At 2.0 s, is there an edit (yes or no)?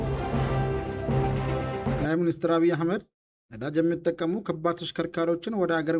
yes